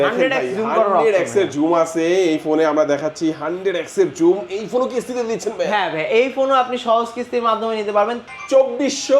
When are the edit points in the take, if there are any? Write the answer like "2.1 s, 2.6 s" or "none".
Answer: 8.2 s